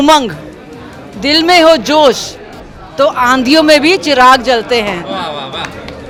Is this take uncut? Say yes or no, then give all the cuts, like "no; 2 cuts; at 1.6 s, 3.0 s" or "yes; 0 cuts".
yes; 0 cuts